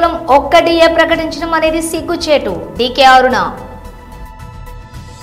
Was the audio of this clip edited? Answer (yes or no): yes